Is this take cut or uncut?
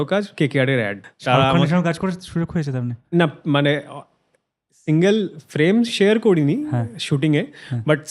cut